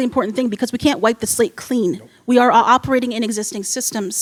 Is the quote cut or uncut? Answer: uncut